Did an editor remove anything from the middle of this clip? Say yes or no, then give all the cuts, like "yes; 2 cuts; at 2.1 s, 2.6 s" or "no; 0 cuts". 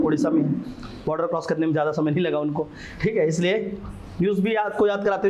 no; 0 cuts